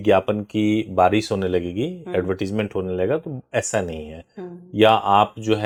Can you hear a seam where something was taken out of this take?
no; 0 cuts

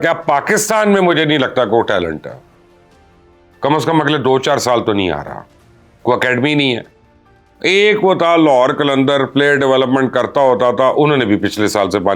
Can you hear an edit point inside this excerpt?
no; 0 cuts

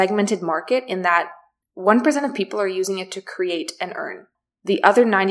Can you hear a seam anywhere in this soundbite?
no; 0 cuts

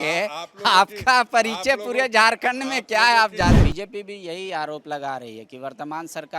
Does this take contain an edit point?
yes; 1 cut; at 3.6 s

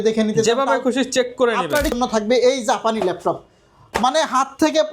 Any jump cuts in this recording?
yes; 1 cut; at 2.0 s

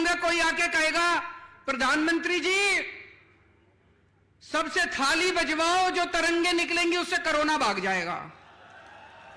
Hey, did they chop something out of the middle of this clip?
no; 0 cuts

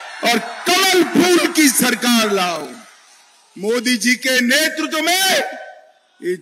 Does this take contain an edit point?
no; 0 cuts

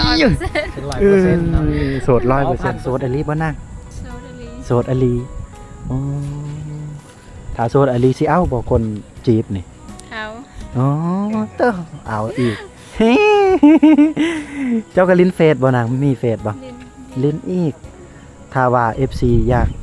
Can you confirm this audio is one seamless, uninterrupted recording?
no; 1 cut; at 2.8 s

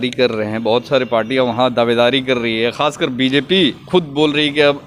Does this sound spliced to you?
no; 0 cuts

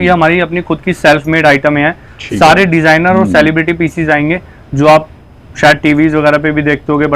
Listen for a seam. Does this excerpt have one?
no; 0 cuts

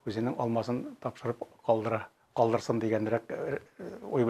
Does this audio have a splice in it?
no; 0 cuts

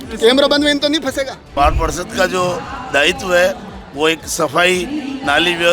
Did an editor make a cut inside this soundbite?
yes; 1 cut; at 1.4 s

